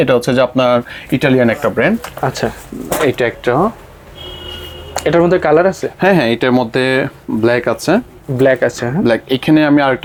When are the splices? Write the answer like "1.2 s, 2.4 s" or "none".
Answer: none